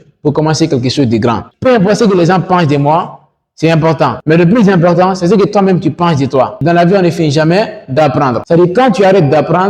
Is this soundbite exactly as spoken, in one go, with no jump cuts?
no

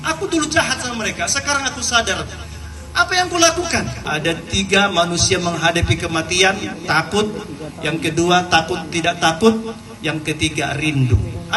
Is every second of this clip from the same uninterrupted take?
no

